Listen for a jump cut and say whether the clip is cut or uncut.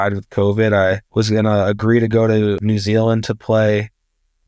cut